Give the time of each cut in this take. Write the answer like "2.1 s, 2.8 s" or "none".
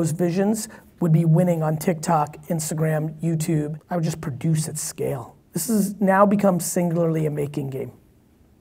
3.8 s